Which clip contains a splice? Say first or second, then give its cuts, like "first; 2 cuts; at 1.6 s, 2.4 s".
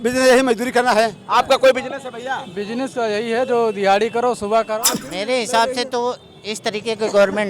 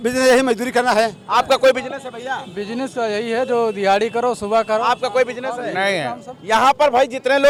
first; 1 cut; at 4.8 s